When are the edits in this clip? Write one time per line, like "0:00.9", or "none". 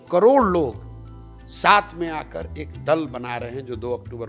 none